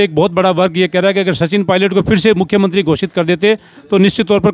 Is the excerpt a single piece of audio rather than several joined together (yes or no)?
yes